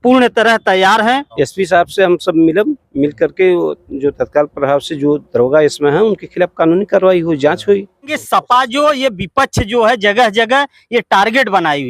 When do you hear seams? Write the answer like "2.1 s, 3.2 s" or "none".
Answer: 1.3 s, 8.2 s